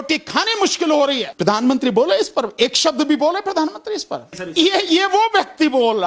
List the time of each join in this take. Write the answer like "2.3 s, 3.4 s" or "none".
1.3 s, 4.4 s

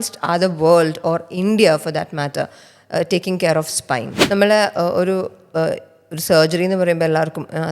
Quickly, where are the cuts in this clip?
4.1 s

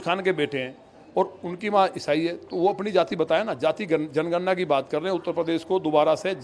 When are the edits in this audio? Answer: none

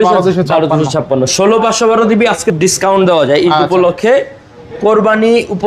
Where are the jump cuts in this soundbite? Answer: 2.5 s

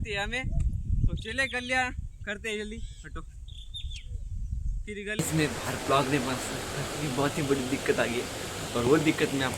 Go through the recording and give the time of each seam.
5.1 s

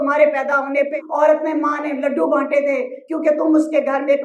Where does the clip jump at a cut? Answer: 1.0 s

